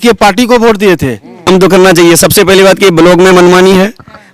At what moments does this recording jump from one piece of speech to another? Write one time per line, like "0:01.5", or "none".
0:01.5